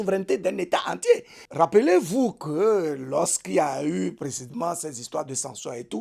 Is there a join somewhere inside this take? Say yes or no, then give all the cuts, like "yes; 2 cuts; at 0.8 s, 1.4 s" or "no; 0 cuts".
yes; 1 cut; at 1.3 s